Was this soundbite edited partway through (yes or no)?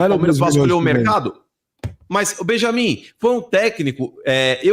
no